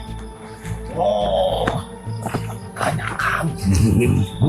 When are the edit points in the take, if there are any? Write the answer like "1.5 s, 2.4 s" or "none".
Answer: none

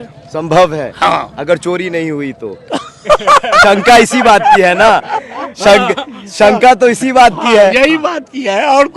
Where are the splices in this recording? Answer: none

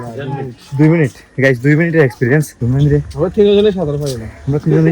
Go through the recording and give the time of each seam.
2.6 s

